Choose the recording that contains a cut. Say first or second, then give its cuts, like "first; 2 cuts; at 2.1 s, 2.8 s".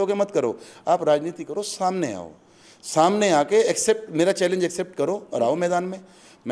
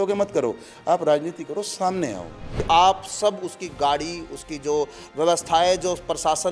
second; 1 cut; at 2.6 s